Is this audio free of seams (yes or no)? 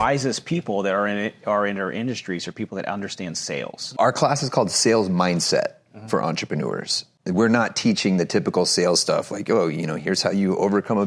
no